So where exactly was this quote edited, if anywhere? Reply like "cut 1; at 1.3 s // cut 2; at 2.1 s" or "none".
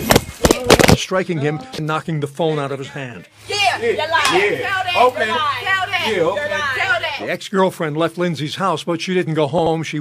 cut 1; at 2.7 s